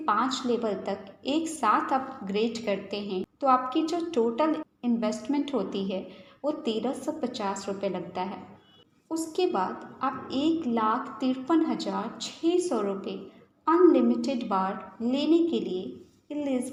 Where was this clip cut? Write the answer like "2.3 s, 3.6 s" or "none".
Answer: none